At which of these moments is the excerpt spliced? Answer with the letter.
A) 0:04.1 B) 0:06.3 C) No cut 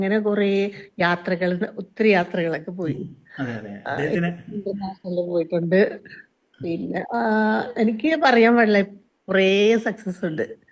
C